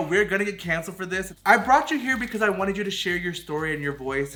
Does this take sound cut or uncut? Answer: uncut